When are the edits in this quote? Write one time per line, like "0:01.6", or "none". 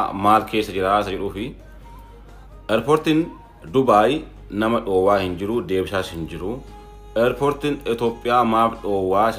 none